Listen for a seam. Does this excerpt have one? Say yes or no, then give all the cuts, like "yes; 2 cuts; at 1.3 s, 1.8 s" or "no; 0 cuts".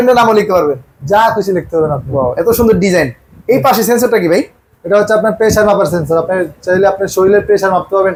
no; 0 cuts